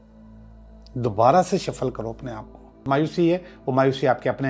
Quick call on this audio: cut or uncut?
cut